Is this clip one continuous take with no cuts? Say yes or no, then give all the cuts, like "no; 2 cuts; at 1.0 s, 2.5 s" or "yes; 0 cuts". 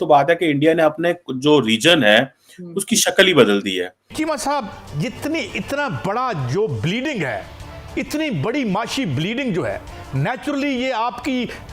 no; 1 cut; at 4.1 s